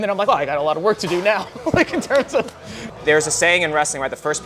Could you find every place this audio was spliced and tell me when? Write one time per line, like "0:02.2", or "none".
0:02.8